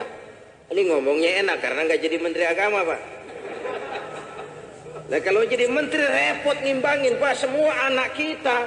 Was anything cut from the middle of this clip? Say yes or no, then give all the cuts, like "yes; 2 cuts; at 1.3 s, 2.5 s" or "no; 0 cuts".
no; 0 cuts